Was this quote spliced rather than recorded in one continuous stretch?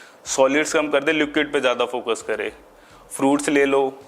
no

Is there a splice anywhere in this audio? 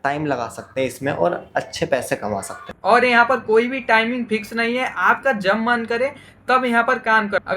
yes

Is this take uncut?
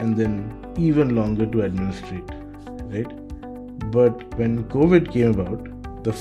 no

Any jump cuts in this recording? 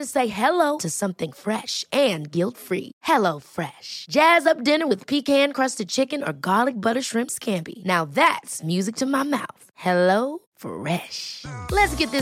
no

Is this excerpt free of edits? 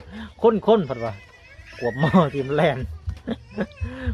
yes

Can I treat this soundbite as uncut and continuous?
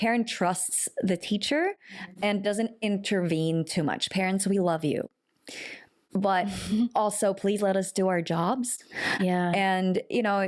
yes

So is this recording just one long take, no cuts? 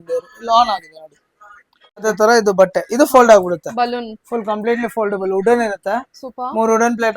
no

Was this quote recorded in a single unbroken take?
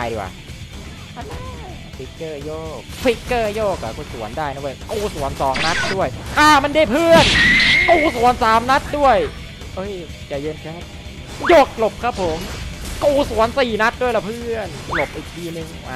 yes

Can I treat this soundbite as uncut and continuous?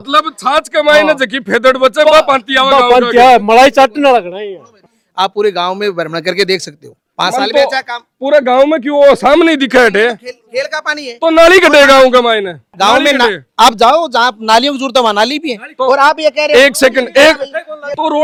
yes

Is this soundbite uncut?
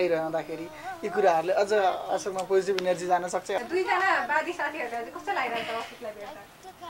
no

